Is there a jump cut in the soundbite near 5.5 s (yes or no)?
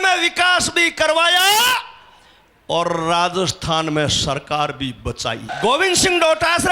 yes